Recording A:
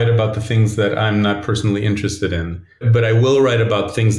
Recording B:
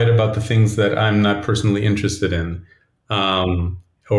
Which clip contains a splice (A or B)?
A